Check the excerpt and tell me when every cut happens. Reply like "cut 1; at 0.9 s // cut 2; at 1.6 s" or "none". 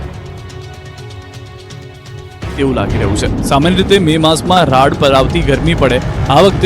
cut 1; at 4.7 s

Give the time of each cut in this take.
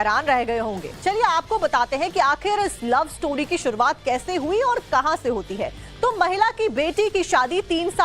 cut 1; at 3.8 s

